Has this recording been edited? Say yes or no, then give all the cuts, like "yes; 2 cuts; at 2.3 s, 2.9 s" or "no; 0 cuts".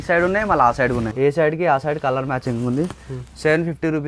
yes; 1 cut; at 1.1 s